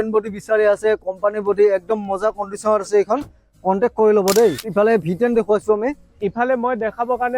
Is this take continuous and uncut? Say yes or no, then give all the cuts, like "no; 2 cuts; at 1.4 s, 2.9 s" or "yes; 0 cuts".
no; 1 cut; at 4.6 s